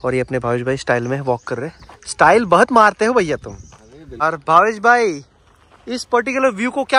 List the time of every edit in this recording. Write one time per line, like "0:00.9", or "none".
0:04.2

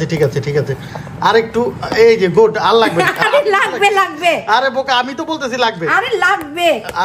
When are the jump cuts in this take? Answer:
none

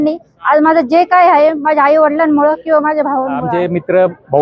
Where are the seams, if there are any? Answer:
0:03.4

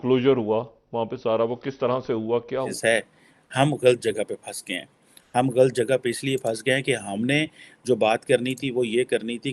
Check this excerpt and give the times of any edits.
0:02.7

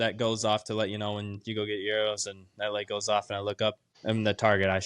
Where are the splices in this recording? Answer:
0:03.9

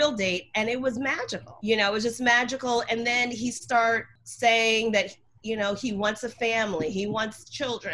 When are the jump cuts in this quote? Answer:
0:01.5
0:04.2

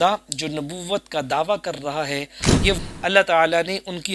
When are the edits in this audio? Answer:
0:02.8

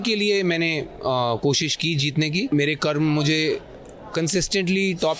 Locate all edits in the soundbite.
0:02.5

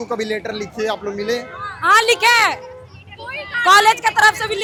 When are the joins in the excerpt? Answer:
none

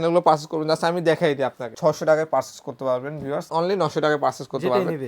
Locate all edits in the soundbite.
0:01.7
0:03.5

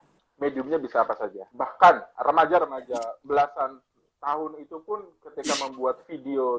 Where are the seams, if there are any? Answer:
0:01.4
0:02.1

